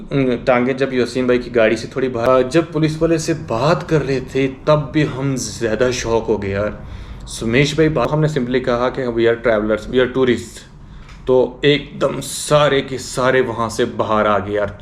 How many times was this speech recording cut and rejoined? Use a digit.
2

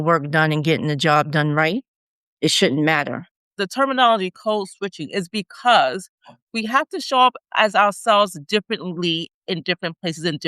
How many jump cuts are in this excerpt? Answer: 1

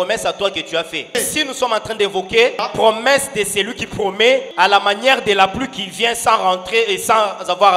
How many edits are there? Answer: 3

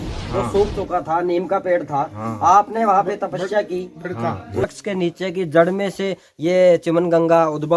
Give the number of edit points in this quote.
1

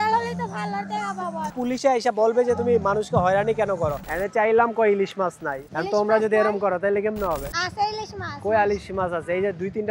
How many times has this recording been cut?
3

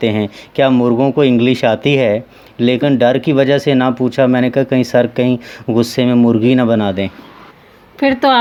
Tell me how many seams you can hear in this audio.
0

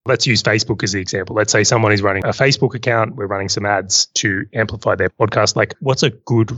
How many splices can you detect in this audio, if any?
1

